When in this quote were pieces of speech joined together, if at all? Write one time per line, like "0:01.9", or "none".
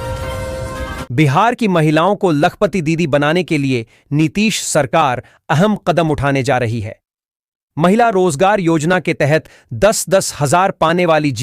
0:01.0

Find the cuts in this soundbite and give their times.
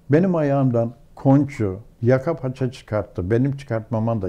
0:01.9

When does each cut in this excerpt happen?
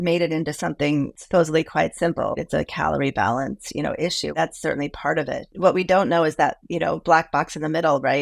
0:01.1
0:02.3
0:04.4
0:05.5

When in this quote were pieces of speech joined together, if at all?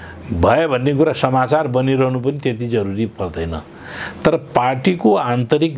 none

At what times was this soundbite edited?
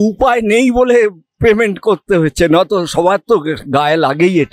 none

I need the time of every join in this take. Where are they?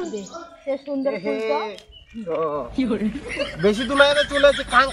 none

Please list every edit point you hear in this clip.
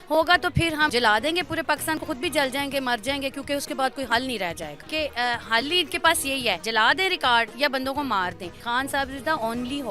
0:00.9
0:04.8
0:06.6
0:08.6

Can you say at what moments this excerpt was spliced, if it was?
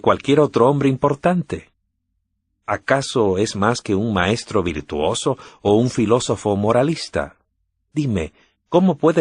0:04.8

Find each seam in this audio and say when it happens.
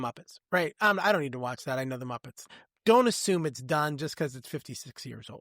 0:02.4

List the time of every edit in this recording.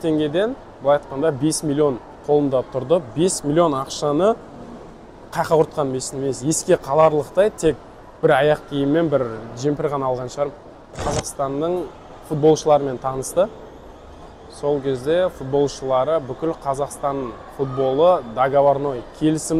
0:11.0

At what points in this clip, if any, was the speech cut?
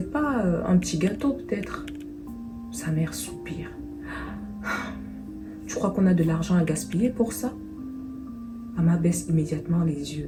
none

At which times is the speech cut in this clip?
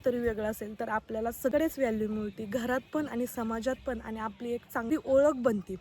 0:01.5
0:04.9

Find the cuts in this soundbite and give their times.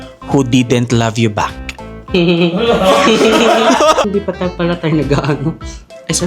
0:04.1

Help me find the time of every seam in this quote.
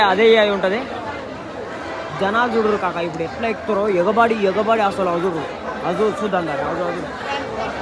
none

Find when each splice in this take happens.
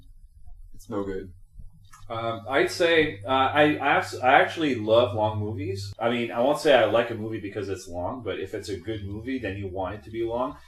none

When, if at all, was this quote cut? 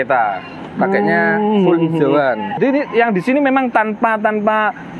0:02.6

